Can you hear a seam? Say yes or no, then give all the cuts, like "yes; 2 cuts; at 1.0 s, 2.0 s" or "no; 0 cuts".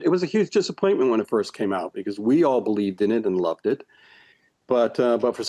no; 0 cuts